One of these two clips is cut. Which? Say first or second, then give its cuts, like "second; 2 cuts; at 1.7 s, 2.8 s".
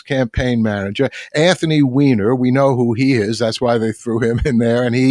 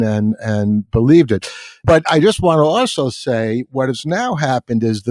second; 1 cut; at 1.8 s